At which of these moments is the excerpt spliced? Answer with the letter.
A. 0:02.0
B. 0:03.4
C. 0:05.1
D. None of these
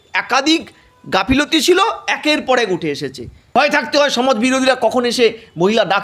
B